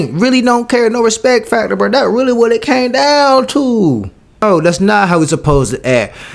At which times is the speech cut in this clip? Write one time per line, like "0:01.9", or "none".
0:04.4